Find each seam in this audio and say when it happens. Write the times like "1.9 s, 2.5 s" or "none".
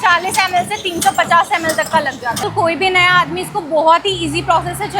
2.4 s